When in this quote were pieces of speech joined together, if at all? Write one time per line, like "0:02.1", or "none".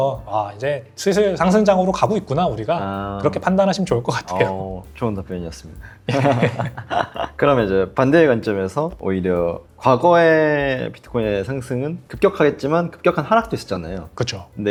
none